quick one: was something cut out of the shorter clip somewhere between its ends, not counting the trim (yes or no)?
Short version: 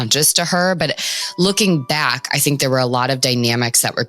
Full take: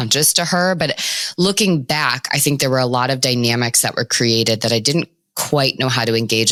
no